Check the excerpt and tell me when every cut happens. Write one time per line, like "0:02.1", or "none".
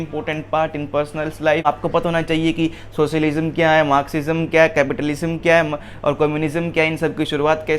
0:01.6